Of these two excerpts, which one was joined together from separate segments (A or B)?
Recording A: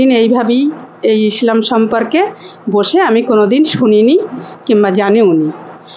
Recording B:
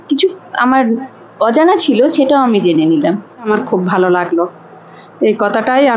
B